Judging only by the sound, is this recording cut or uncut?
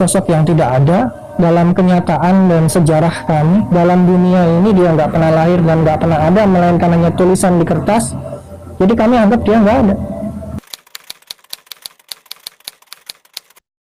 uncut